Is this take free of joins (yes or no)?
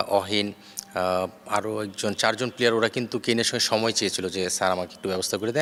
yes